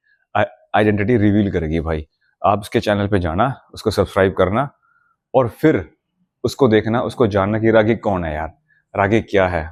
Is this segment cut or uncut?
uncut